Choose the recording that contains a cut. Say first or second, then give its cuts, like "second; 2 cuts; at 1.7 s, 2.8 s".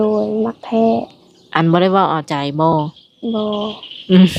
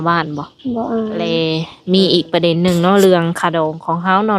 second; 1 cut; at 1.3 s